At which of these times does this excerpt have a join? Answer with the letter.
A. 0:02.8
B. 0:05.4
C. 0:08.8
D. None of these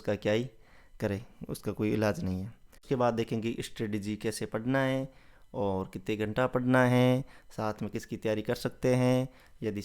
A